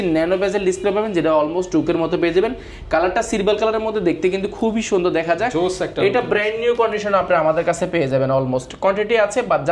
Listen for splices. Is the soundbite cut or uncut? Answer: uncut